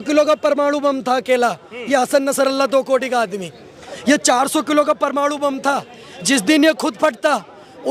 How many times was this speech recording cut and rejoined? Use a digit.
0